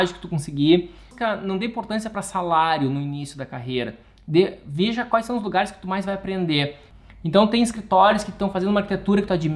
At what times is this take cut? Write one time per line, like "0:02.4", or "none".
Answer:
0:01.1
0:06.8